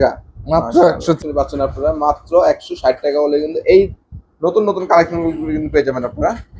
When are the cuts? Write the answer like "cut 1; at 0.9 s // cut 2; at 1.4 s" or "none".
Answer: cut 1; at 1.2 s